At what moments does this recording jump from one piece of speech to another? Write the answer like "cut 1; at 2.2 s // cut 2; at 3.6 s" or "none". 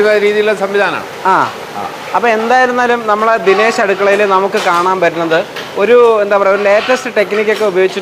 none